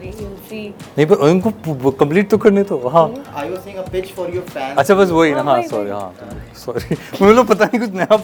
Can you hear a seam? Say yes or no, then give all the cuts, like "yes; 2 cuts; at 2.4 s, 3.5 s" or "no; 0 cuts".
no; 0 cuts